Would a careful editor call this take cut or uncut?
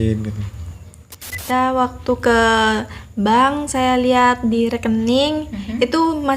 cut